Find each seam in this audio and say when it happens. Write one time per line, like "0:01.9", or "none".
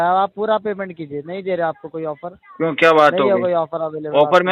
none

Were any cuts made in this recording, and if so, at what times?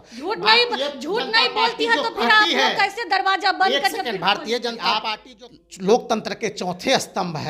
0:05.2

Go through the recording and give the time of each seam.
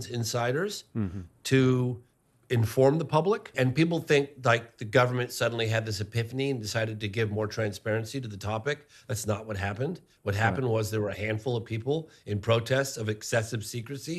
0:03.5

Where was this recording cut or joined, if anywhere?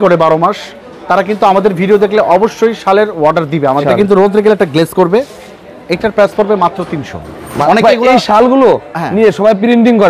0:03.8
0:07.6

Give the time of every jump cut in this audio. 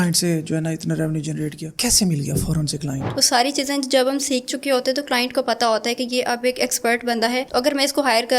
0:03.1

